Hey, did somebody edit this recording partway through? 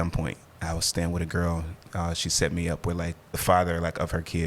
yes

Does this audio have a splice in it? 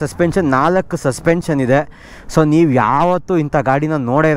no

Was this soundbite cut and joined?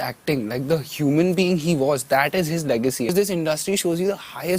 yes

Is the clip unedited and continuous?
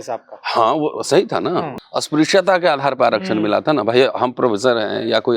no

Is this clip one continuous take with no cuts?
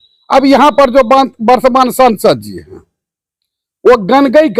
yes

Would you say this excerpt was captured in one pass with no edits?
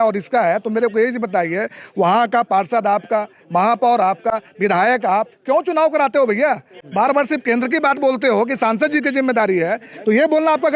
yes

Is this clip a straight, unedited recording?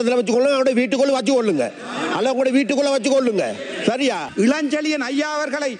no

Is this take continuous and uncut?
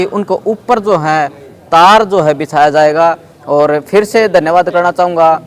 yes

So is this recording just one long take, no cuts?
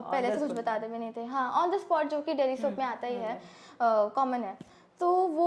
yes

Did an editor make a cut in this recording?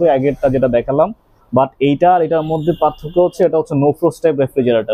no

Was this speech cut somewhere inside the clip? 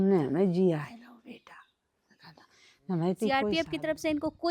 yes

